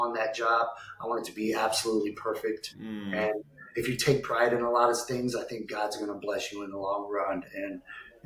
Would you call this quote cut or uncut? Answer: uncut